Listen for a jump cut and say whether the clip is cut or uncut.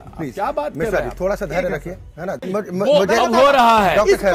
cut